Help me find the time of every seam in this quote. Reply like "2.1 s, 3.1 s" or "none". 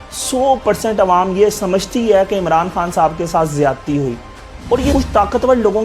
4.9 s

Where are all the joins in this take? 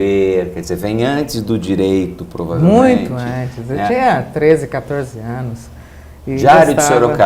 5.1 s

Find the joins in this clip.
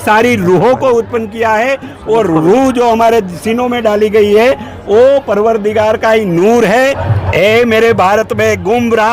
6.8 s

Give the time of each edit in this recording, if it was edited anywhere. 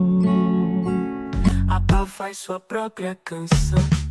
1.5 s

